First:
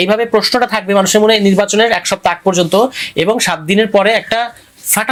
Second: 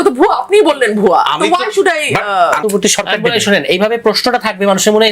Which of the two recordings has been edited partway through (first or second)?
second